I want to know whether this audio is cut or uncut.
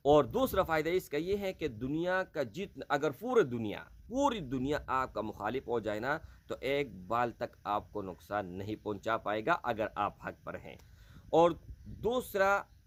uncut